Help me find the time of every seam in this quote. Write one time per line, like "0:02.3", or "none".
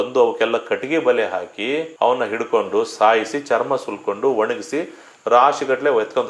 none